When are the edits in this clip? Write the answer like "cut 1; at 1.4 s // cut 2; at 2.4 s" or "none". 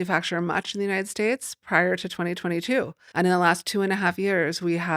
cut 1; at 3.0 s